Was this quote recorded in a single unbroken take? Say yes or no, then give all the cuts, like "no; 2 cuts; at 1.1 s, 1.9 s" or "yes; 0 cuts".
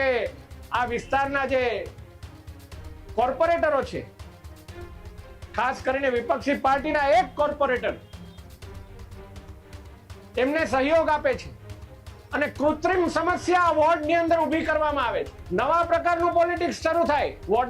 no; 1 cut; at 15.4 s